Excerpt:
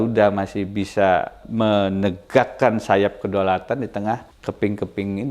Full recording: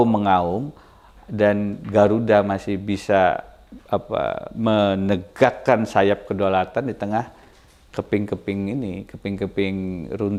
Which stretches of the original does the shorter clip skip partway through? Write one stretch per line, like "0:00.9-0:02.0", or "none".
0:03.5-0:04.5
0:07.4-0:07.8